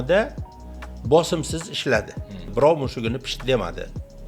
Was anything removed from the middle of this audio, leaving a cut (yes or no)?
yes